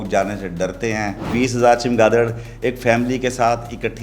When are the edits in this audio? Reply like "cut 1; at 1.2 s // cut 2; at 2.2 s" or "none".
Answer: cut 1; at 1.3 s